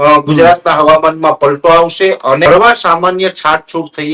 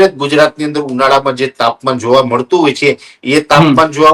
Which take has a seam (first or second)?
first